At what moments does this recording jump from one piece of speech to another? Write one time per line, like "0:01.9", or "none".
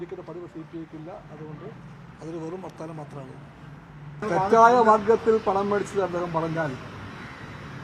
0:04.2